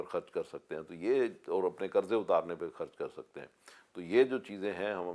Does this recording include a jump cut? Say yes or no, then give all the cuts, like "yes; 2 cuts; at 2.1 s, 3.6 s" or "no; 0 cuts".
no; 0 cuts